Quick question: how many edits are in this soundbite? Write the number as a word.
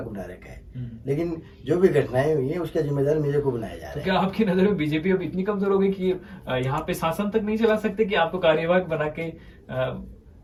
zero